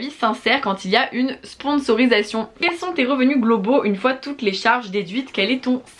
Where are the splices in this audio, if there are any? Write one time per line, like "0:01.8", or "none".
0:02.7